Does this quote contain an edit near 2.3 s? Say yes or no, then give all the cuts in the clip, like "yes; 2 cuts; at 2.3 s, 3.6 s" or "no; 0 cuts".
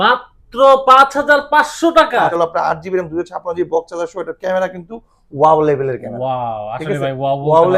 yes; 1 cut; at 2.3 s